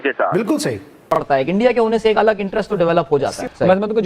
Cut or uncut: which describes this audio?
cut